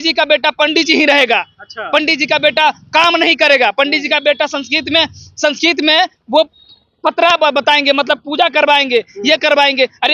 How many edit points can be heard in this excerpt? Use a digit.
0